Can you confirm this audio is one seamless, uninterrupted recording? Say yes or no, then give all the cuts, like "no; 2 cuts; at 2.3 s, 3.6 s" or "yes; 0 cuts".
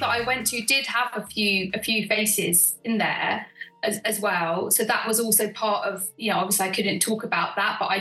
yes; 0 cuts